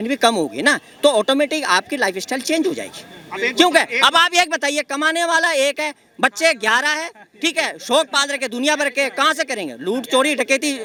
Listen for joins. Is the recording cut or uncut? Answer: uncut